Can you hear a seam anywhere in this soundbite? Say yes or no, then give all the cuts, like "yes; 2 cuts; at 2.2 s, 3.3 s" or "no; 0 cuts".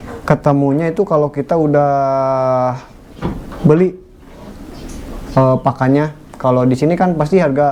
no; 0 cuts